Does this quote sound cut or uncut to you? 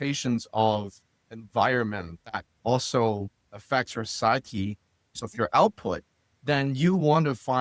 cut